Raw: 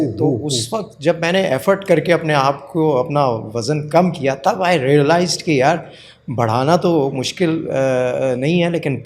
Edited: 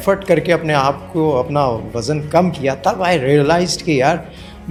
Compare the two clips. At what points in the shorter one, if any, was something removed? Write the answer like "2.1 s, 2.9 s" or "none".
none